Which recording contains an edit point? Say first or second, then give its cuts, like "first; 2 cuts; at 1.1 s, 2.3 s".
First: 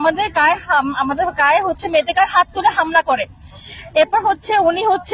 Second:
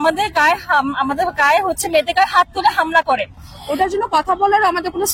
second; 1 cut; at 3.6 s